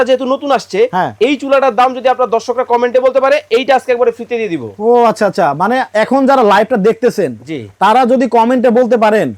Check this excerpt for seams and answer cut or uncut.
uncut